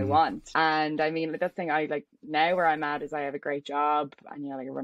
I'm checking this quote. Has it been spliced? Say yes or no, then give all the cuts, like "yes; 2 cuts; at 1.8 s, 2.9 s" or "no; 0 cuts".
no; 0 cuts